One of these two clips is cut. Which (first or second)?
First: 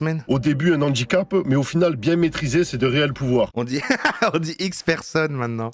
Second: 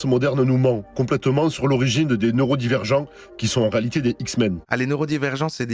second